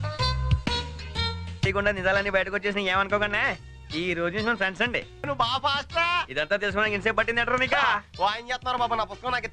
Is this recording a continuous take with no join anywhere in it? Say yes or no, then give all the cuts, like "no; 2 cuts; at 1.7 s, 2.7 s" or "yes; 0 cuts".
no; 2 cuts; at 1.7 s, 5.3 s